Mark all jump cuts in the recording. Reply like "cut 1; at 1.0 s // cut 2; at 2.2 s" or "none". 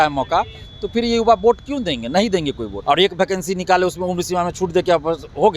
cut 1; at 2.7 s